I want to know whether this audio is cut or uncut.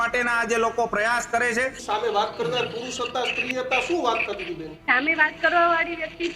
cut